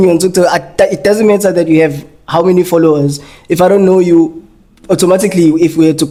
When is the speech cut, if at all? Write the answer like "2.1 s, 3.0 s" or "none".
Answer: none

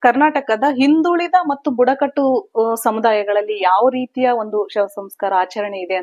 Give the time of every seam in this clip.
none

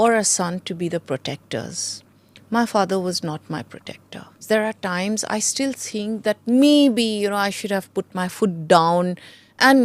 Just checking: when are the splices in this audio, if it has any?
4.4 s

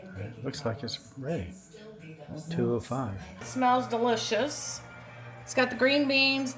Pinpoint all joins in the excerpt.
3.4 s

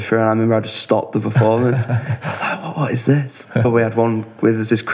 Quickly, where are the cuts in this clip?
3.6 s

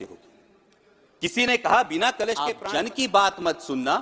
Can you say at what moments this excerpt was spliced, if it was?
2.6 s

